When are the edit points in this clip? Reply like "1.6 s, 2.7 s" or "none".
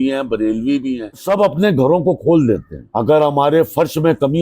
1.1 s, 2.8 s